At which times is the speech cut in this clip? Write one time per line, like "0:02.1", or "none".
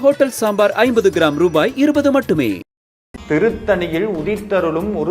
0:03.1